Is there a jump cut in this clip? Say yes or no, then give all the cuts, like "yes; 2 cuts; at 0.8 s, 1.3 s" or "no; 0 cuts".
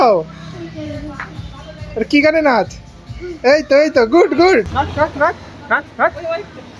no; 0 cuts